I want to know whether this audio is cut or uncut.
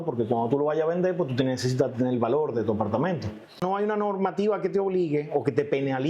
cut